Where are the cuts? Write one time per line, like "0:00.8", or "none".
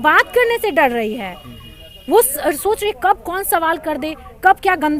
none